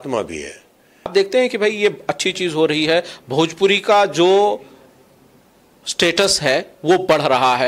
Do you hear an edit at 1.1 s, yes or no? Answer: yes